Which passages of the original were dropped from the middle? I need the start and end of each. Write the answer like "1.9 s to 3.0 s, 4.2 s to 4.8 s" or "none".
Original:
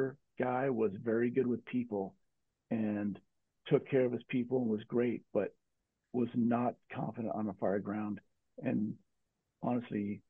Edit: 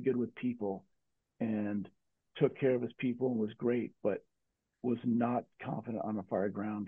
none